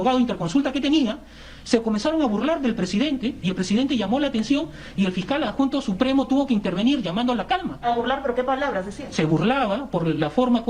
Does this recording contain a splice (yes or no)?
no